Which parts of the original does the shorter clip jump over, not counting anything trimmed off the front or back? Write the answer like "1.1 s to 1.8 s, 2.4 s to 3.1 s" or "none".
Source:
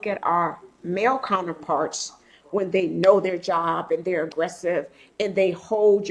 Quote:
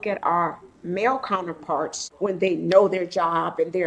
2.0 s to 2.3 s

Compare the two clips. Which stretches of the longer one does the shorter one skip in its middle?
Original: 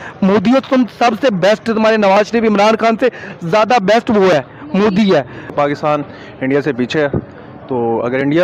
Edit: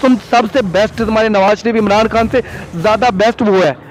none

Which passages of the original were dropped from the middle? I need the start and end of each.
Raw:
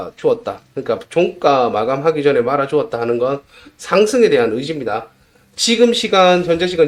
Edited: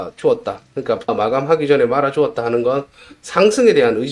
1.1 s to 1.7 s

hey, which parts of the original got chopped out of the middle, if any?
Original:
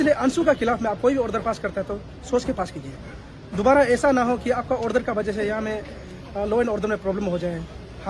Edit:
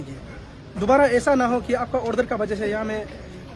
none

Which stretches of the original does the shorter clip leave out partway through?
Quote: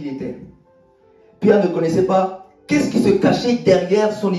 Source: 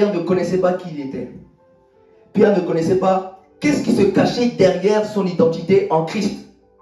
none

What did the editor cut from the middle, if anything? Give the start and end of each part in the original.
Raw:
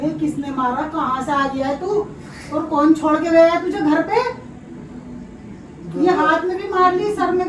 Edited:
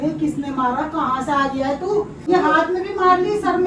2.3 s to 6.0 s

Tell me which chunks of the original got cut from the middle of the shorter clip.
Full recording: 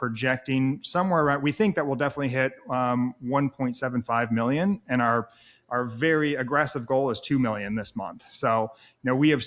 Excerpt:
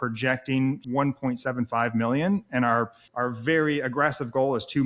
0.8 s to 3.2 s, 5.4 s to 5.6 s

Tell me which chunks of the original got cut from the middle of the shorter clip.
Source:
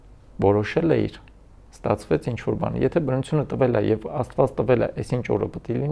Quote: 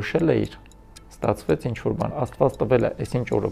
2.7 s to 4.1 s

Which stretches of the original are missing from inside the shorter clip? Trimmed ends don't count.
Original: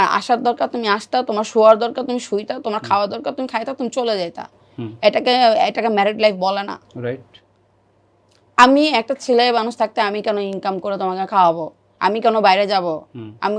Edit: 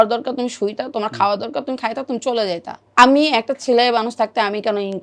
4.5 s to 8.4 s

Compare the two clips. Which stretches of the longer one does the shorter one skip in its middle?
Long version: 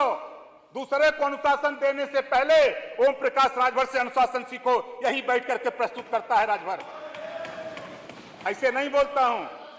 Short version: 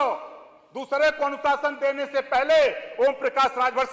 none

